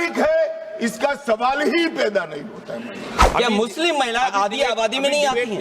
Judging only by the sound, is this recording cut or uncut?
cut